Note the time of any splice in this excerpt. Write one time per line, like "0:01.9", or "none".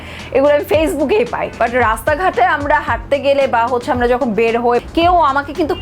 0:01.4
0:04.8